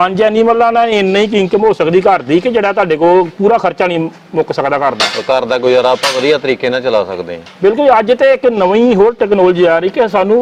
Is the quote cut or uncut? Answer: uncut